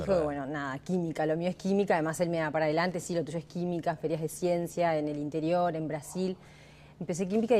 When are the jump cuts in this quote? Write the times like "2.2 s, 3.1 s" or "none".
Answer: 1.9 s

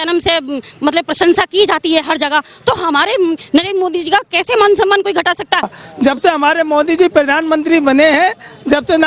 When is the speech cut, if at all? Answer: 5.7 s

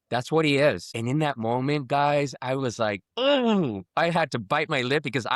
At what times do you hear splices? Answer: 0.9 s

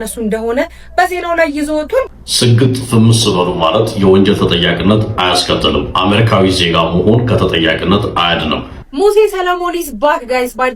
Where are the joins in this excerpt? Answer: 2.0 s, 8.9 s

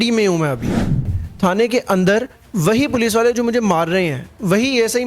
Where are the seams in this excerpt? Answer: 1.2 s

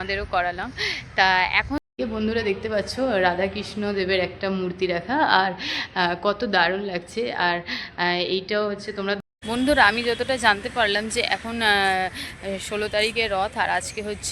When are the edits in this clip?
1.8 s, 9.2 s

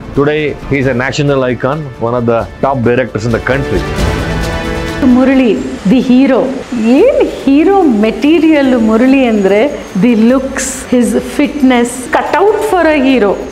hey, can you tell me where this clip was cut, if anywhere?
10.8 s

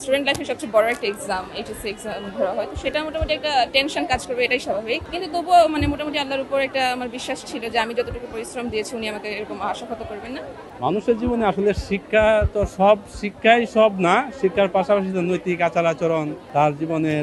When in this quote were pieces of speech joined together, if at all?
5.1 s, 10.7 s, 16.4 s

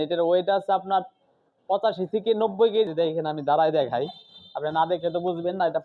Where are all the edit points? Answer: 2.9 s

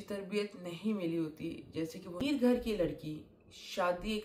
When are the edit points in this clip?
2.2 s

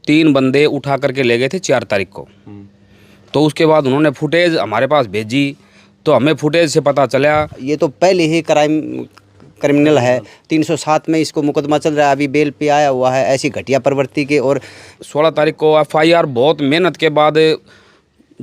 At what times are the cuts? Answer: 7.6 s, 14.9 s

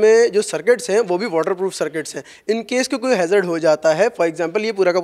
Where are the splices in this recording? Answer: none

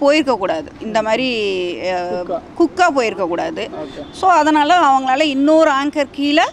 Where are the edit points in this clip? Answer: none

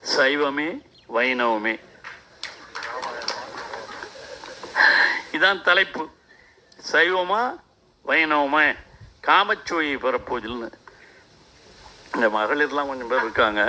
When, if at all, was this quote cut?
none

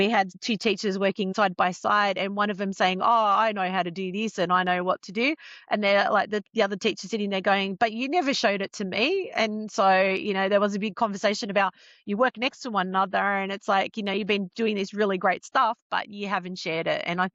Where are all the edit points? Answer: 1.3 s

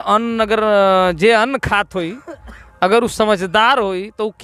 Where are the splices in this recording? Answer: none

